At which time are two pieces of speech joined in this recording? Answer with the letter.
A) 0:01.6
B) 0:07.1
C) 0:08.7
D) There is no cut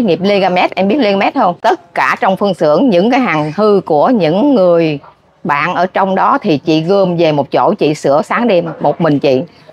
A